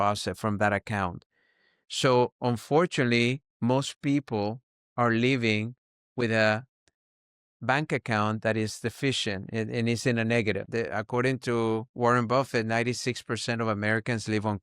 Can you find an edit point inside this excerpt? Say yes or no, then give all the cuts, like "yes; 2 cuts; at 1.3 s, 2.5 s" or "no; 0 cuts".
yes; 1 cut; at 10.6 s